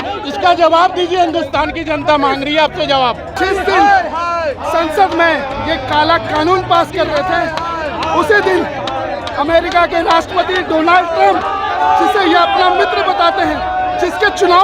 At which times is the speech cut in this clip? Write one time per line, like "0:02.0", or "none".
0:03.4